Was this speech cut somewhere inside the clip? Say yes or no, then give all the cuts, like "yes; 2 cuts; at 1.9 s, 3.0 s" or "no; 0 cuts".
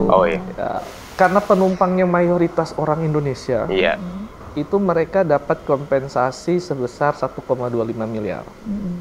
yes; 1 cut; at 1.0 s